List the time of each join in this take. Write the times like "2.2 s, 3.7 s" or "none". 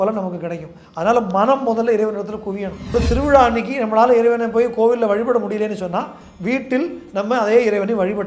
2.9 s